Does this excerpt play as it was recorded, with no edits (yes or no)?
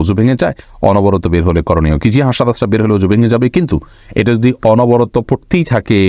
yes